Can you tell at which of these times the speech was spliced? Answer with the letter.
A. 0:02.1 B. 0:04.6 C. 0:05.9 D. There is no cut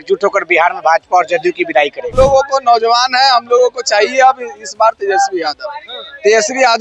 A